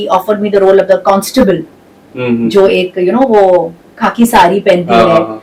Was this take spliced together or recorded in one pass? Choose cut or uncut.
uncut